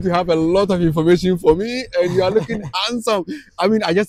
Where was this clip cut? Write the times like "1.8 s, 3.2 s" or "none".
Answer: none